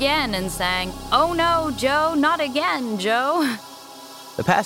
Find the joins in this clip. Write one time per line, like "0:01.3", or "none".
0:00.9
0:03.6